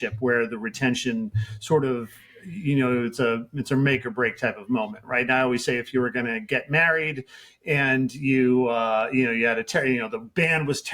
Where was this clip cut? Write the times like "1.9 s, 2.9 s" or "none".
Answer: none